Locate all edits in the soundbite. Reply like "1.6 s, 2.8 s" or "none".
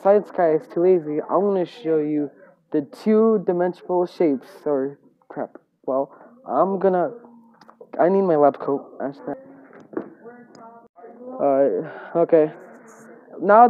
9.2 s, 10.9 s